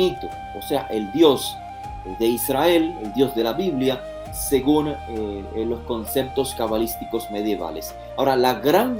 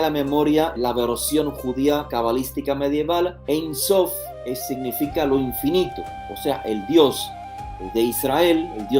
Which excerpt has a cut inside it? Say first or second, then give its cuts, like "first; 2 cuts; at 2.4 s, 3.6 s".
second; 3 cuts; at 0.8 s, 2.1 s, 3.4 s